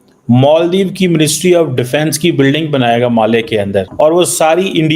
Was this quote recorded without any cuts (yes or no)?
no